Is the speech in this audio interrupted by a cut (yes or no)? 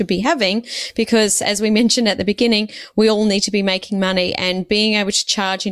no